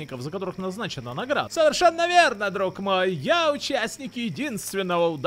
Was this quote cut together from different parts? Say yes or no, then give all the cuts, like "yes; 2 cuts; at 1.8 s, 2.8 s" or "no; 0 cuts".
yes; 1 cut; at 1.5 s